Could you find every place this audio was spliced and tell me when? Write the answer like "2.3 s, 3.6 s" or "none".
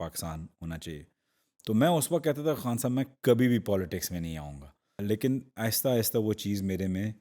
5.0 s